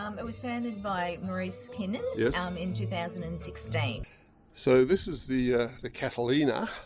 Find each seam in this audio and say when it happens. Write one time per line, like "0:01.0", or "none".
0:04.0